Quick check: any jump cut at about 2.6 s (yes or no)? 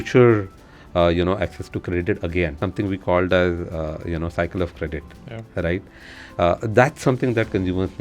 yes